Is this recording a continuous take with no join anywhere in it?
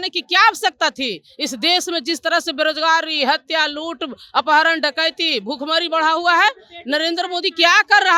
yes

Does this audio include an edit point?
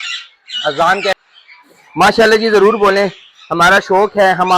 yes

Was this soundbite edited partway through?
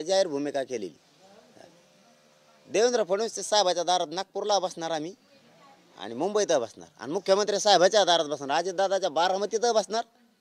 no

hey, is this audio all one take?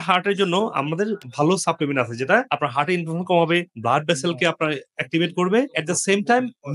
yes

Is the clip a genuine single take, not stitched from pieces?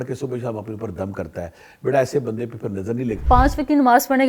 no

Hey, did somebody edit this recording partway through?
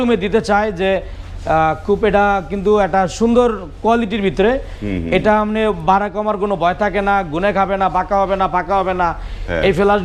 no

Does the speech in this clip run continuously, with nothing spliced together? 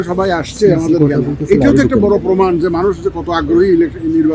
yes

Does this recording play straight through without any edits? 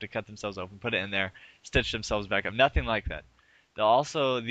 no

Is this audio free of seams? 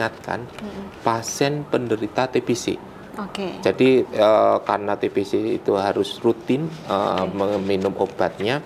yes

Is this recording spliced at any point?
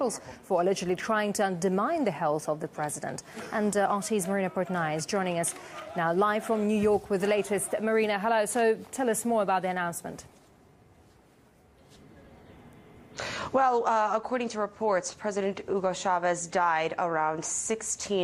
no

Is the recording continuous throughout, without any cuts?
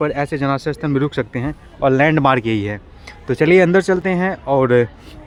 yes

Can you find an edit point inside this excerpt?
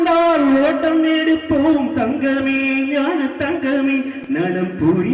no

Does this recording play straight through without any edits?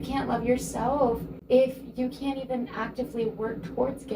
no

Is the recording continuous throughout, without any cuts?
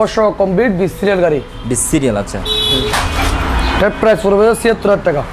yes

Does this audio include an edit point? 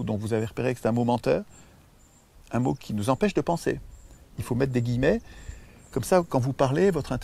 no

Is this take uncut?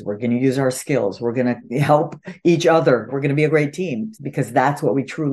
no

